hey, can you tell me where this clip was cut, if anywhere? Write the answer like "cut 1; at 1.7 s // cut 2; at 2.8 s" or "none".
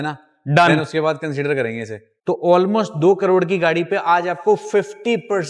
cut 1; at 2.2 s